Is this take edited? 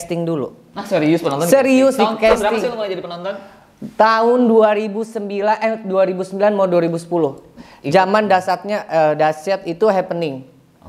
no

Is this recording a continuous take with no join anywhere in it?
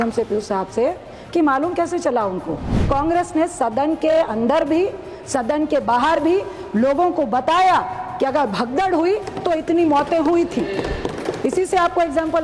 no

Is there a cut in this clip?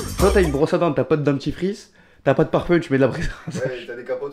no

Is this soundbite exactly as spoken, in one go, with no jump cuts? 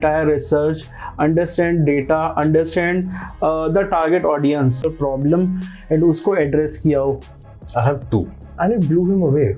no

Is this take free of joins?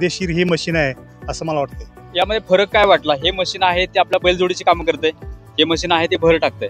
no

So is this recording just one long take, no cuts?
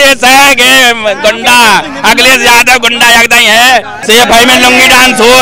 no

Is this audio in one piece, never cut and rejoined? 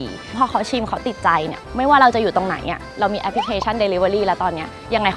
yes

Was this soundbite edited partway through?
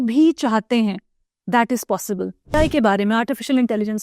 yes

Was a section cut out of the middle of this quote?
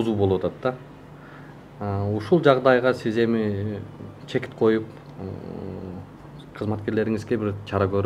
no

